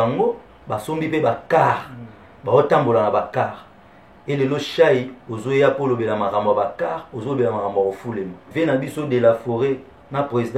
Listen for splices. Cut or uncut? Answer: cut